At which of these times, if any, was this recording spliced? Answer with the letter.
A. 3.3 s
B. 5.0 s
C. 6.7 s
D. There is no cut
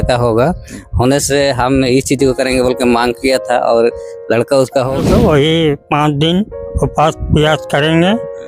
B